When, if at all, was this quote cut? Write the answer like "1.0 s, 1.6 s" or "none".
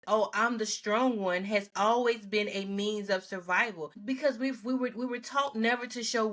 4.0 s

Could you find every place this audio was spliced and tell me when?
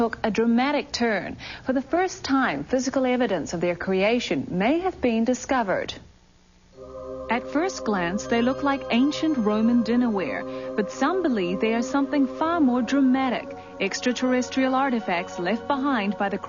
3.1 s

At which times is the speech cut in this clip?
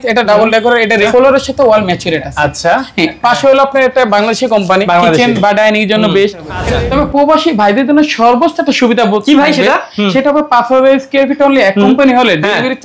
1.1 s, 6.8 s

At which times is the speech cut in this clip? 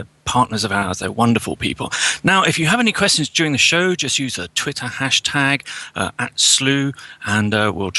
none

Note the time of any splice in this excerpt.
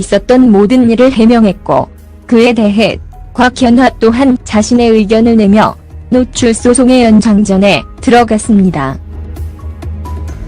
2.2 s

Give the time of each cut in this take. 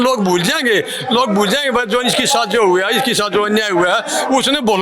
none

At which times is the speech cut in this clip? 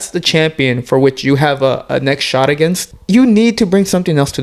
2.9 s

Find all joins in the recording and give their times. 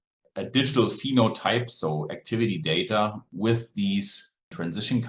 none

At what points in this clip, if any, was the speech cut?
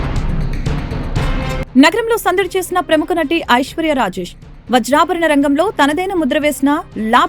none

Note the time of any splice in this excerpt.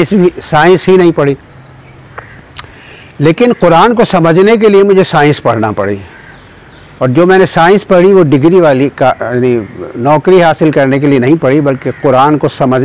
none

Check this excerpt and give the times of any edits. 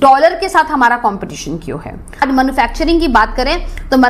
2.2 s

